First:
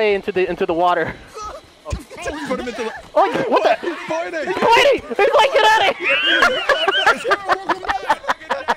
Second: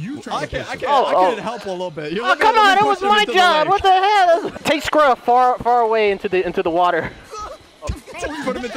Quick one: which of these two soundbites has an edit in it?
second; 1 cut; at 4.6 s

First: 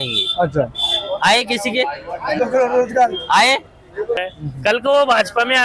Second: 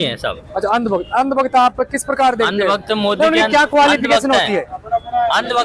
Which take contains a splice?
first; 1 cut; at 4.2 s

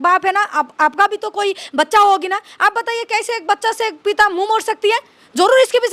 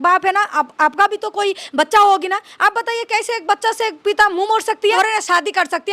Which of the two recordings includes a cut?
second; 1 cut; at 4.9 s

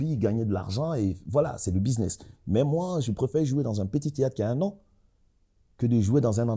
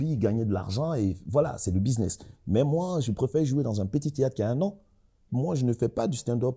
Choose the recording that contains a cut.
second; 1 cut; at 5.3 s

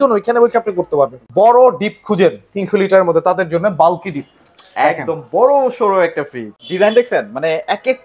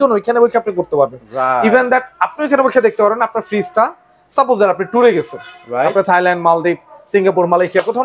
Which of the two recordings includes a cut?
first; 2 cuts; at 1.2 s, 6.5 s

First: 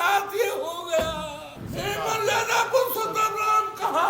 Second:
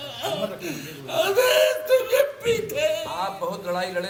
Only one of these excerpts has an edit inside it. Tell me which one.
first; 1 cut; at 1.6 s

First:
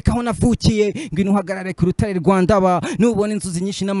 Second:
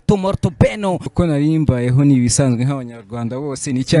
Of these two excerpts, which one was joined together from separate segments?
second; 1 cut; at 1.1 s

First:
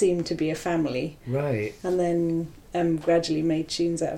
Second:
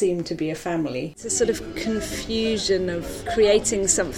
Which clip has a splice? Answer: second; 2 cuts; at 1.2 s, 3.1 s

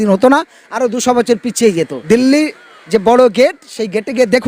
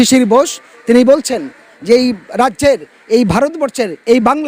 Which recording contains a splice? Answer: first; 1 cut; at 2.0 s

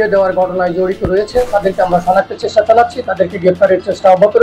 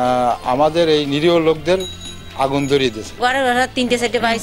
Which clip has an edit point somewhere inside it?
second; 1 cut; at 3.1 s

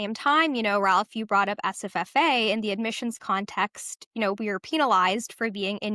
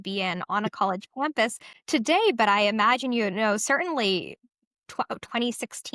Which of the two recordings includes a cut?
second; 1 cut; at 1.7 s

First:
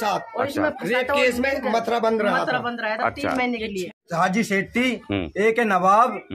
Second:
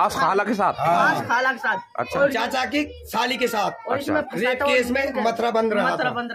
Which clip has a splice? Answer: first; 1 cut; at 4.0 s

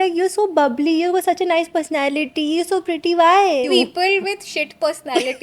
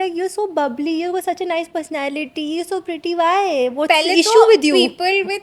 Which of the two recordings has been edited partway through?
first; 1 cut; at 3.7 s

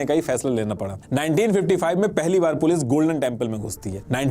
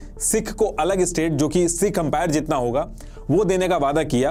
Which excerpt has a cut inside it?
first; 1 cut; at 1.0 s

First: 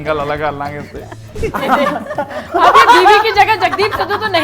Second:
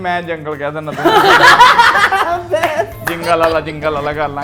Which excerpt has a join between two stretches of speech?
first; 1 cut; at 1.6 s

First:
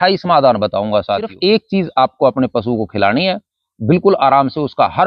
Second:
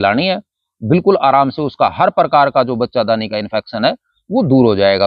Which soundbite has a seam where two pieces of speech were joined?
first; 1 cut; at 1.3 s

